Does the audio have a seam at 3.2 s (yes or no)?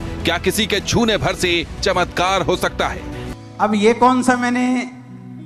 yes